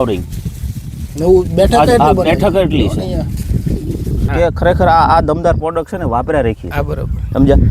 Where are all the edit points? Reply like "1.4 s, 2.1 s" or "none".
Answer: 4.2 s